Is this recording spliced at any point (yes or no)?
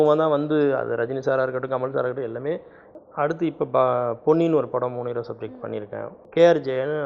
yes